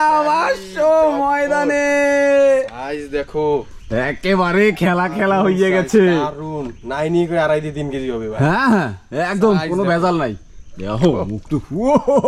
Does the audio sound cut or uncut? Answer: uncut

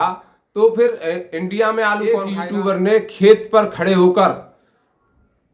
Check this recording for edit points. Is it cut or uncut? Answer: cut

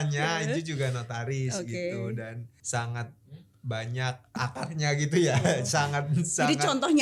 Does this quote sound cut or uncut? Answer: cut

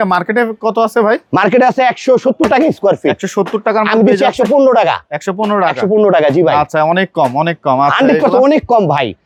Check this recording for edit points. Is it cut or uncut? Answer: uncut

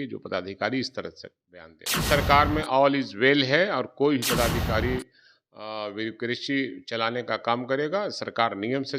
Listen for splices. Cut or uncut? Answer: cut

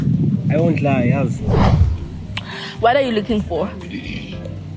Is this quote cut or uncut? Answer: cut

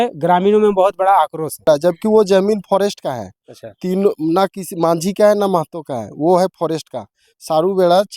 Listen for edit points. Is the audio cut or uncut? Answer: cut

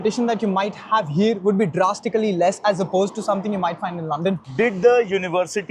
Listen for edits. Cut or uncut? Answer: cut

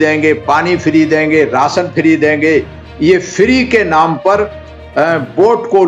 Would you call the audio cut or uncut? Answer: uncut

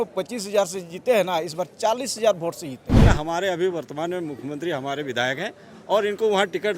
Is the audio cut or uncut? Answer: cut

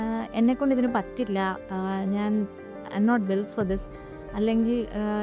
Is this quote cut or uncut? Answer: uncut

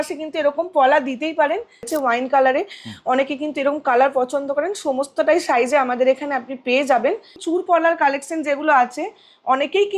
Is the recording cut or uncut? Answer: cut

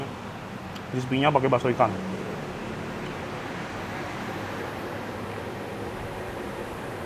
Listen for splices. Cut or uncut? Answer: uncut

